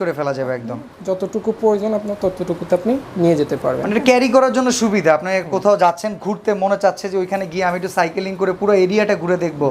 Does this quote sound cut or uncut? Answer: uncut